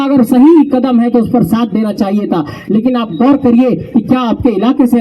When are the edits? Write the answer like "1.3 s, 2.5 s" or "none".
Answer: none

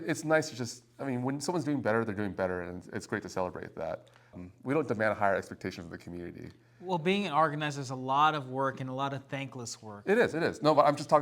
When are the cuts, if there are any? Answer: none

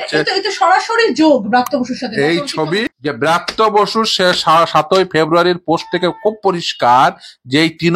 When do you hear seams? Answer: 2.9 s

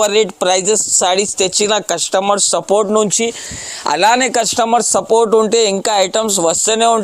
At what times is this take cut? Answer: none

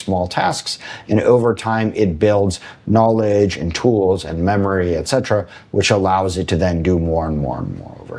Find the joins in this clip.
none

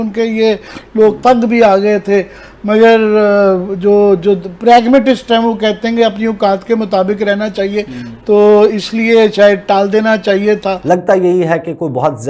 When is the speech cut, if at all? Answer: 10.8 s

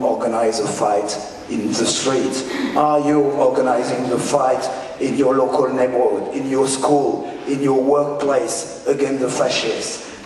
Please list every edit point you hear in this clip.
none

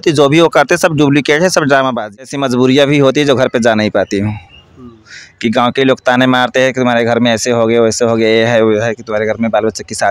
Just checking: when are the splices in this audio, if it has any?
2.2 s

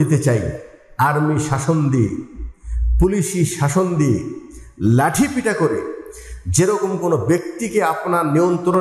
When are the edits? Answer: none

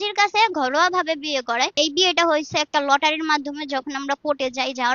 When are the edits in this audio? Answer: 1.8 s

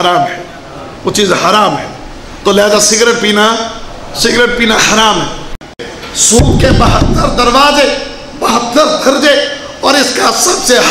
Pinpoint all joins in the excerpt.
5.6 s

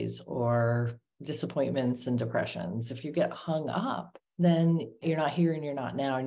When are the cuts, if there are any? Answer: 1.1 s, 4.2 s, 5.0 s

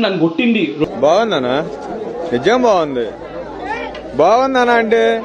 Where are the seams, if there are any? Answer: none

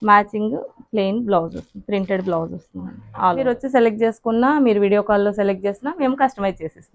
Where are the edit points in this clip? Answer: 3.5 s

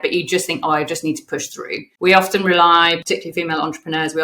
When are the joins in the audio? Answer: 1.8 s, 3.0 s

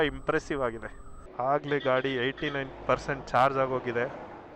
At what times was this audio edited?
1.3 s

